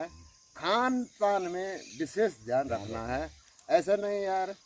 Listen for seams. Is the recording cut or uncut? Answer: uncut